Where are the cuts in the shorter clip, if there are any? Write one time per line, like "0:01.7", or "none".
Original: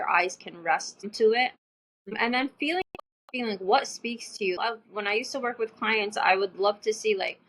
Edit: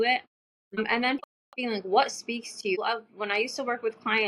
0:01.2